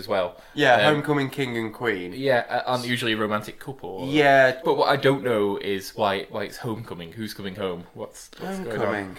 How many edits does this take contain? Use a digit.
1